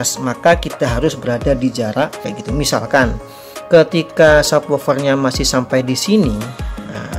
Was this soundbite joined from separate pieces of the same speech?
yes; 1 cut; at 2.3 s

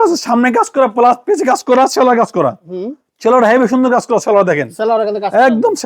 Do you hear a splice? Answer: no; 0 cuts

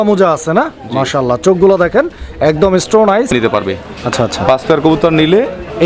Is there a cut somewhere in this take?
yes; 1 cut; at 3.3 s

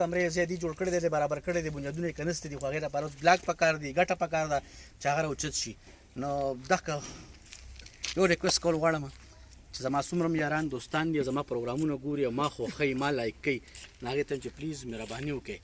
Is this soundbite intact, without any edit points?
yes; 0 cuts

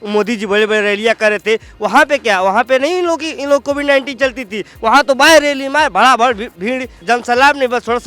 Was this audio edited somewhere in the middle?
yes; 1 cut; at 6.9 s

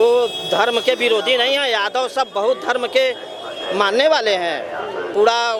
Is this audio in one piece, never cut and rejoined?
yes; 0 cuts

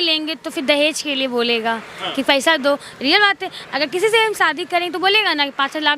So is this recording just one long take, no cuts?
yes; 0 cuts

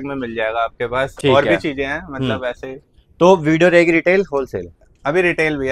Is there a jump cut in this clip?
no; 0 cuts

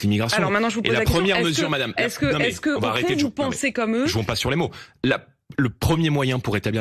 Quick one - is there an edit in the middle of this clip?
no; 0 cuts

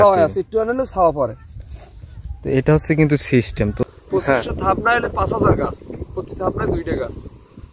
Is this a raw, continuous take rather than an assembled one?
no; 1 cut; at 3.8 s

